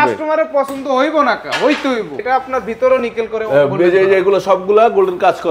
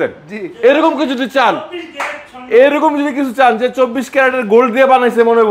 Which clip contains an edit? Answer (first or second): first